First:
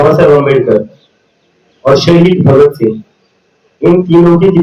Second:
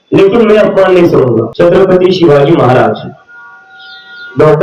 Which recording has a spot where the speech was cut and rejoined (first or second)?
second